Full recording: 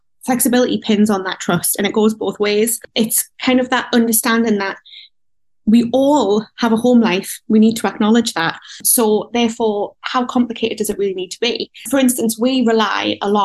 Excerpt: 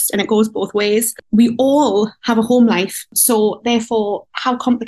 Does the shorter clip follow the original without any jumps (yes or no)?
no